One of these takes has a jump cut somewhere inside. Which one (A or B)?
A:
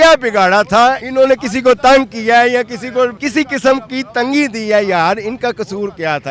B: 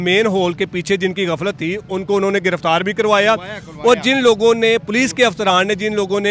A